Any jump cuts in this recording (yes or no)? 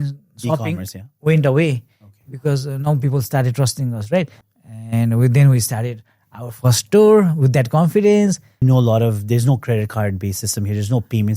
yes